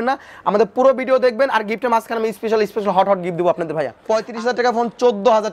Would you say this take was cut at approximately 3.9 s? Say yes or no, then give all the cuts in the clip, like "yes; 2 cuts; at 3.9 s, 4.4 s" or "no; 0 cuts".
yes; 1 cut; at 3.9 s